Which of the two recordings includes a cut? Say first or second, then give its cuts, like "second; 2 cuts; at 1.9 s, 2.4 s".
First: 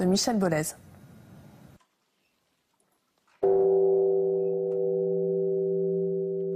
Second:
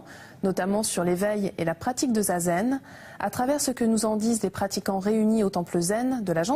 second; 1 cut; at 4.4 s